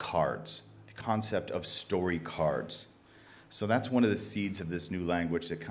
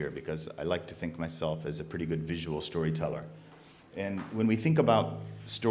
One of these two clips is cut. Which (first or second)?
first